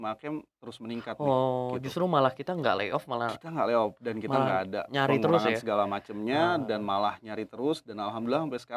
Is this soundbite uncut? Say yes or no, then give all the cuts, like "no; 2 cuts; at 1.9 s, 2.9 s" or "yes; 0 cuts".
yes; 0 cuts